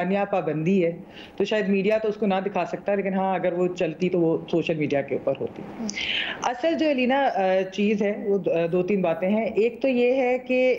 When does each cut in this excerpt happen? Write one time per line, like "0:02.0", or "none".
none